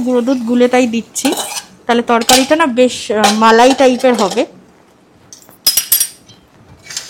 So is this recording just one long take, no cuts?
yes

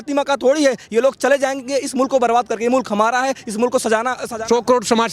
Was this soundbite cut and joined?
yes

